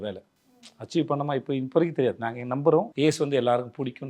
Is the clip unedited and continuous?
no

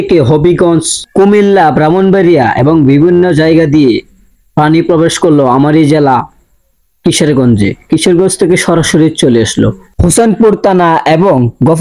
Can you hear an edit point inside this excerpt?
no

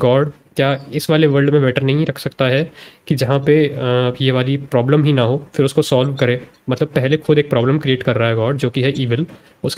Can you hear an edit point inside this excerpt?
no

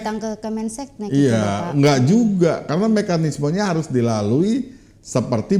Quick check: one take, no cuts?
yes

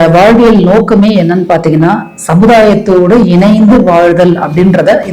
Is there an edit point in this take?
no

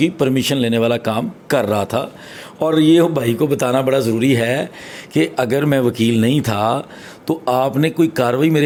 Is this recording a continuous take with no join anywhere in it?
yes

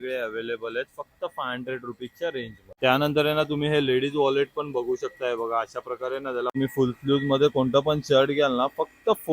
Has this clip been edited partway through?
yes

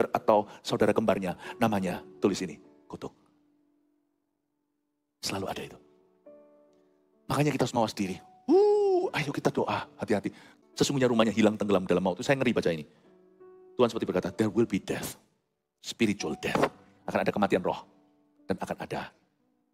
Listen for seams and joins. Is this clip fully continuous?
yes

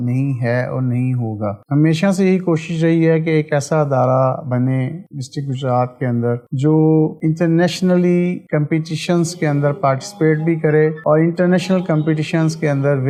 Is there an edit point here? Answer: no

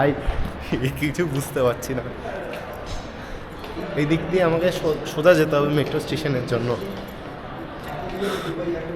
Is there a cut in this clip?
no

